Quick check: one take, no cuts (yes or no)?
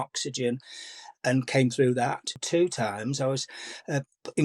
no